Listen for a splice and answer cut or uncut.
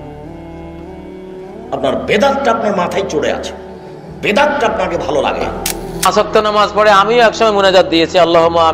uncut